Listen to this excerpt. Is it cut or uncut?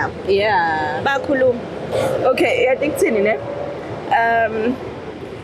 uncut